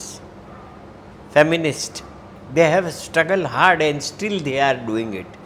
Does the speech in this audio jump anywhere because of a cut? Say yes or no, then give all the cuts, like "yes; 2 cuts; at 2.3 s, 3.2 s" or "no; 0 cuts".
no; 0 cuts